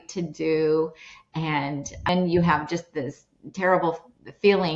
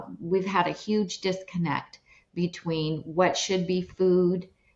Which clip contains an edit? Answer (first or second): first